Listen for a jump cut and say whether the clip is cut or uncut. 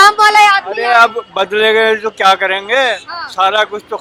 uncut